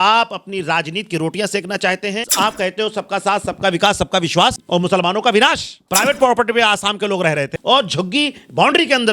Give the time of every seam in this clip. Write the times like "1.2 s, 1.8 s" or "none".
2.2 s, 4.6 s, 5.7 s, 7.5 s